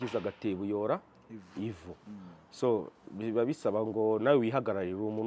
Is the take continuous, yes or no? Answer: yes